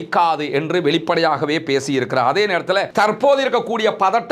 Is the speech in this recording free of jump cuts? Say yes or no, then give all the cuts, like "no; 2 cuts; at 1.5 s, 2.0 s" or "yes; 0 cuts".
no; 1 cut; at 2.9 s